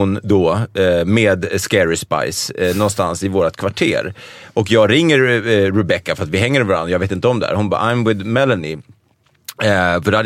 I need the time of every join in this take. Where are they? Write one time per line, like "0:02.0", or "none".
none